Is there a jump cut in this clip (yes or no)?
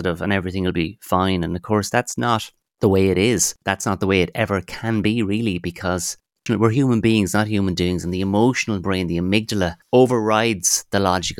yes